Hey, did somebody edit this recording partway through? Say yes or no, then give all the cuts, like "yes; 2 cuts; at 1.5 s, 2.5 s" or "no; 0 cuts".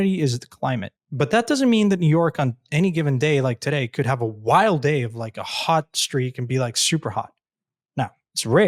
yes; 1 cut; at 1.0 s